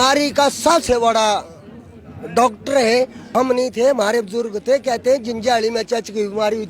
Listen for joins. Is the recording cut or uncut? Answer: cut